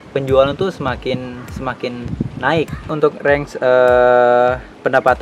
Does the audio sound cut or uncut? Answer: cut